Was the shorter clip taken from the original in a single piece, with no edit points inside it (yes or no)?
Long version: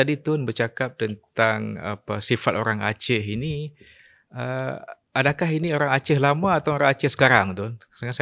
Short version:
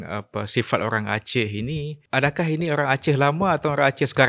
no